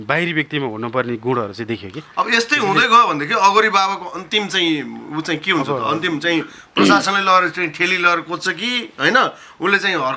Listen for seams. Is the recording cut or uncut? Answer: uncut